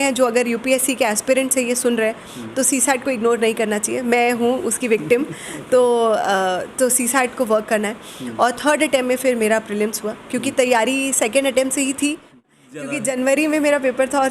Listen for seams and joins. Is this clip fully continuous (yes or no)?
no